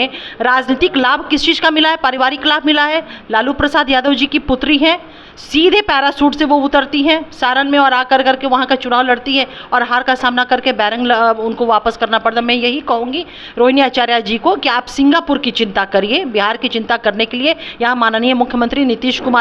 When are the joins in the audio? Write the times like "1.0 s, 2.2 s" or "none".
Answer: none